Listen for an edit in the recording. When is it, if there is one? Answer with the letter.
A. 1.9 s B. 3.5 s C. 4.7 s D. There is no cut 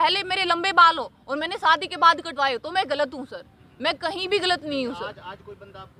D